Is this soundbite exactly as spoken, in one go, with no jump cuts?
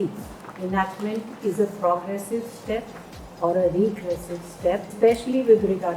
no; 1 cut; at 4.9 s

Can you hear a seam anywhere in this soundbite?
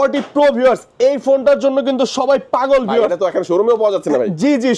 no; 0 cuts

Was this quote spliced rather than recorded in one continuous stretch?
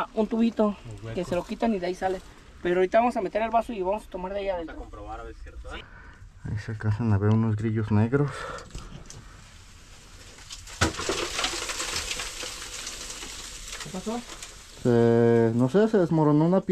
yes; 1 cut; at 5.9 s

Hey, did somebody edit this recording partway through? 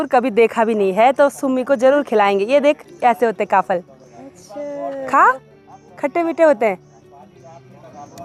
no; 0 cuts

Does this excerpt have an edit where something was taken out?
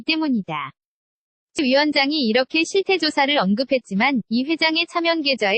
yes; 1 cut; at 1.6 s

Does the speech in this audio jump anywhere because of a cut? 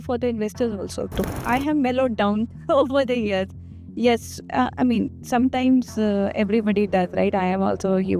yes; 1 cut; at 1.3 s

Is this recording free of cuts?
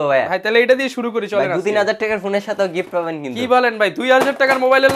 yes; 0 cuts

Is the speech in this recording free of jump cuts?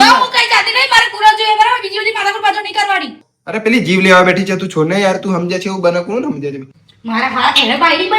no; 2 cuts; at 3.2 s, 6.8 s

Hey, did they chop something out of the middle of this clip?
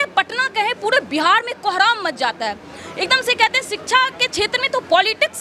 no; 0 cuts

